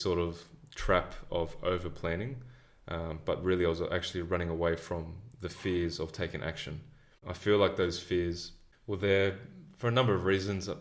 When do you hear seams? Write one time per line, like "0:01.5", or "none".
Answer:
none